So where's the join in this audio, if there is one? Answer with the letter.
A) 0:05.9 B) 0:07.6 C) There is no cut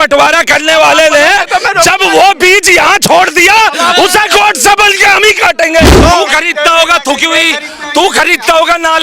A